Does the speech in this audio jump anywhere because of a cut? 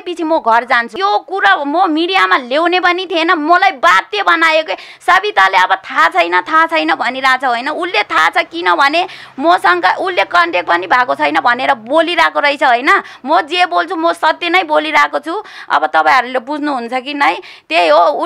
yes; 1 cut; at 0.9 s

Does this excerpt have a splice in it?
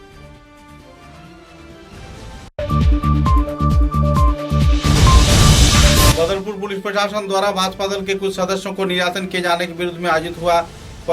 yes; 2 cuts; at 2.5 s, 6.1 s

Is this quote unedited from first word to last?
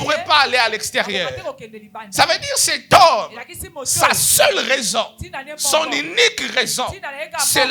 yes; 0 cuts

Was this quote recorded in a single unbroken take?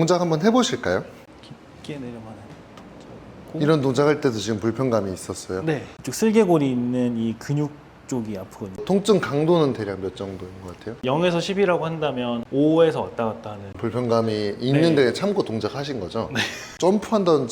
no; 5 cuts; at 1.3 s, 5.9 s, 8.8 s, 13.8 s, 16.8 s

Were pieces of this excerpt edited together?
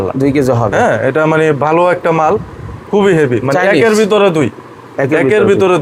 no; 0 cuts

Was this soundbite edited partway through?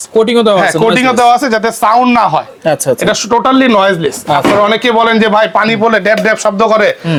no; 0 cuts

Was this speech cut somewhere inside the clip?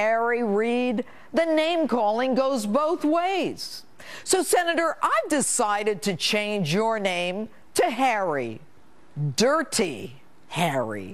yes; 1 cut; at 8.7 s

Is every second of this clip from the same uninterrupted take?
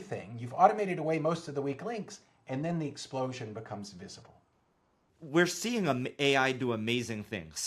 no; 1 cut; at 4.5 s

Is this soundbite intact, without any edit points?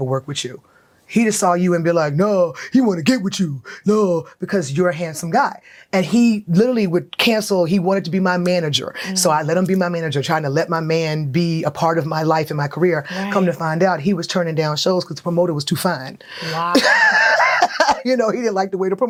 yes; 0 cuts

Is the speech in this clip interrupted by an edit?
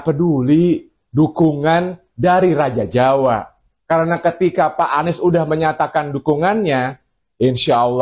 no; 0 cuts

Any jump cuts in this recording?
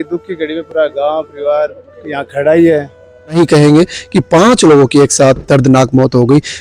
yes; 1 cut; at 3.4 s

